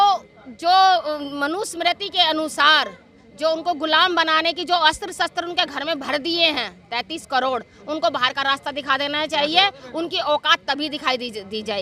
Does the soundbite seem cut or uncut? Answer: uncut